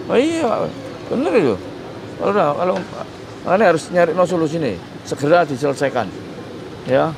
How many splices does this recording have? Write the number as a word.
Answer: zero